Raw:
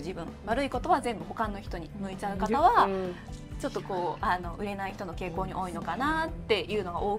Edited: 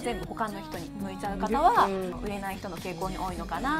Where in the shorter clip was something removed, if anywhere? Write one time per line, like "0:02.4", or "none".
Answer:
0:02.2